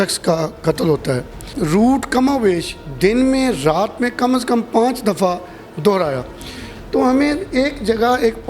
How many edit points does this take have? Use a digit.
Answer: 1